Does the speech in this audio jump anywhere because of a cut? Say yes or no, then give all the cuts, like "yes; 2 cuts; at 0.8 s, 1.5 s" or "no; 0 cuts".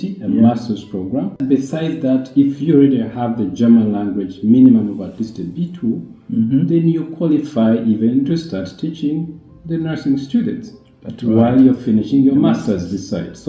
yes; 1 cut; at 1.4 s